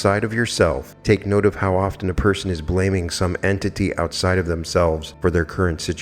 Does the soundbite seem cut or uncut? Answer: cut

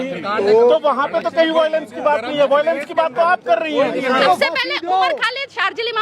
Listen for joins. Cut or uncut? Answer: cut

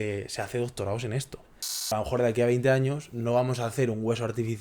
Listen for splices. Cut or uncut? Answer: cut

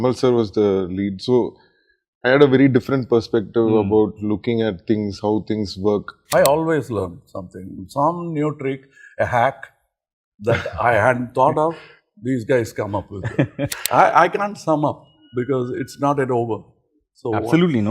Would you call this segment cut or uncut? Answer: cut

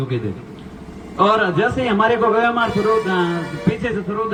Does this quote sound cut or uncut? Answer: uncut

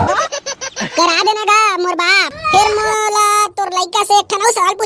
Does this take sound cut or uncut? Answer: cut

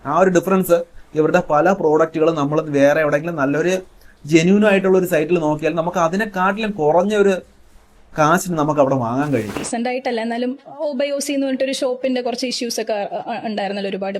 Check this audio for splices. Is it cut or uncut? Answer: cut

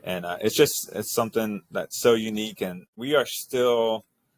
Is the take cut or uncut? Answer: cut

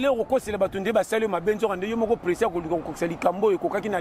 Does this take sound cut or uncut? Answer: uncut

